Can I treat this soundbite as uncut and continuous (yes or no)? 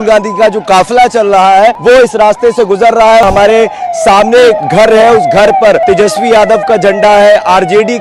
no